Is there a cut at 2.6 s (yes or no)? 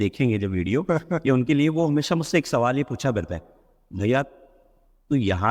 no